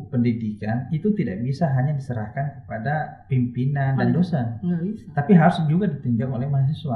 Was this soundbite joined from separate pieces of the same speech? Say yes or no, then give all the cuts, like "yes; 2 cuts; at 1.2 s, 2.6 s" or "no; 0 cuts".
no; 0 cuts